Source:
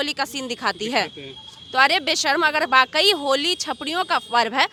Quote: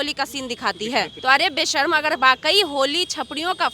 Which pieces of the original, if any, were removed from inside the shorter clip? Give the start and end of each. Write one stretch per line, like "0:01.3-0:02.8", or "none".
0:01.1-0:01.6